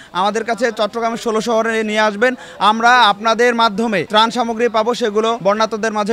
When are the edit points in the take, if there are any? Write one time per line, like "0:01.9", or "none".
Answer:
0:04.0
0:05.4